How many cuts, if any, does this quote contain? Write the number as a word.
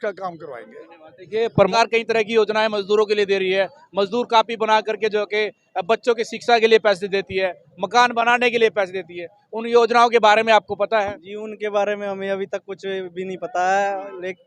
one